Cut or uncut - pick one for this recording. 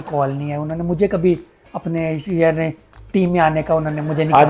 uncut